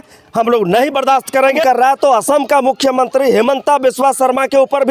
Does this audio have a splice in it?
yes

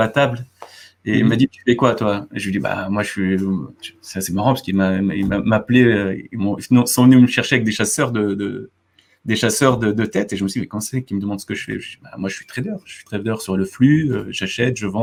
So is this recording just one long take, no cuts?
yes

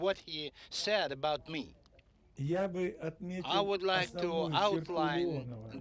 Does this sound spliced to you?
no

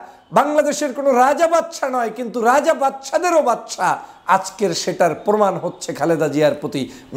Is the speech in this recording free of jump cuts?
yes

